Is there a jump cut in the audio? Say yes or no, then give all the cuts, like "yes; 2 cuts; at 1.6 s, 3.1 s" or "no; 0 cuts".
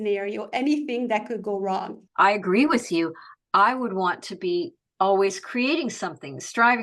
yes; 1 cut; at 2.0 s